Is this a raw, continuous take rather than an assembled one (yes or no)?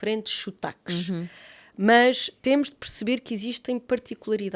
no